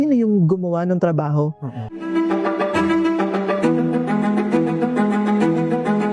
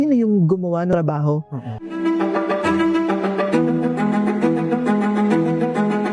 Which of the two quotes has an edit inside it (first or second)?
second